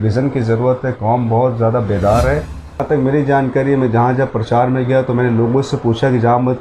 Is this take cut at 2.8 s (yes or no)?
yes